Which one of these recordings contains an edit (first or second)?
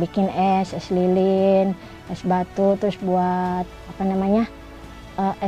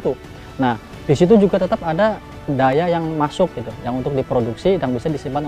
second